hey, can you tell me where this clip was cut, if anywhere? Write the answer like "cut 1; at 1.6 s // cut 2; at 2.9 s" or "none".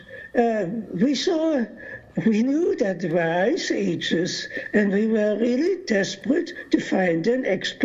cut 1; at 2.3 s